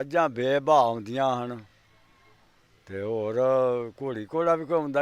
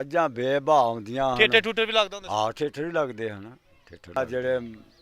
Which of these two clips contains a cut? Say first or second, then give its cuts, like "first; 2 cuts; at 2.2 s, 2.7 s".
second; 2 cuts; at 1.4 s, 4.2 s